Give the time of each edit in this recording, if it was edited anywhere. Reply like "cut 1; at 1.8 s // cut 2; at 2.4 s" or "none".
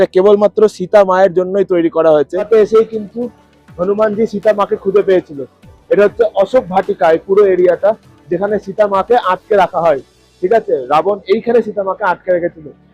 cut 1; at 2.5 s